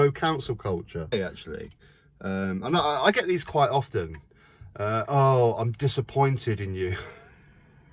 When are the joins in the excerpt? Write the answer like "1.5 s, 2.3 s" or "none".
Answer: 1.1 s